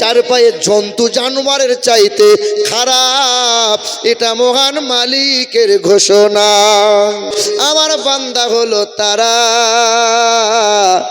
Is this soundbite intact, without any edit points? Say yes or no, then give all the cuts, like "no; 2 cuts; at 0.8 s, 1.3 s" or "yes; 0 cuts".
no; 1 cut; at 7.3 s